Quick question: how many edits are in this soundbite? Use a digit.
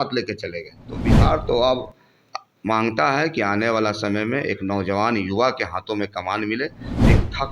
1